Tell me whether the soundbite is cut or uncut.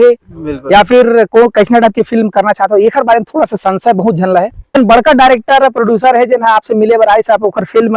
cut